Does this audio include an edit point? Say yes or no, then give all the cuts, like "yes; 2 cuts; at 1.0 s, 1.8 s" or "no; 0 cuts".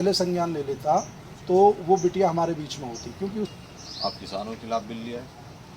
yes; 1 cut; at 3.5 s